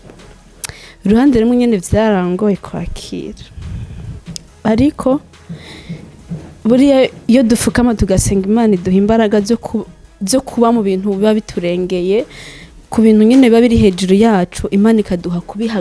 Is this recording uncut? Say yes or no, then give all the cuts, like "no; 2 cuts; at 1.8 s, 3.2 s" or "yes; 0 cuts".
yes; 0 cuts